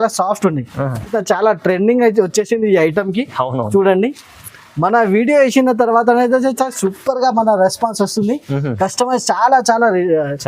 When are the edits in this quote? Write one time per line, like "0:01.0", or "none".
0:01.1